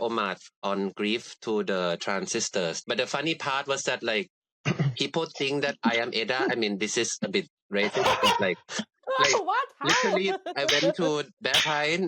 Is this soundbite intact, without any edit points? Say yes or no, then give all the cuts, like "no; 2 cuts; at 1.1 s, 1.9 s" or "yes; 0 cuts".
no; 1 cut; at 2.8 s